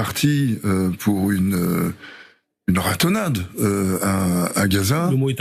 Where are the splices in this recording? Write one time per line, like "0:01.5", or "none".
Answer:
none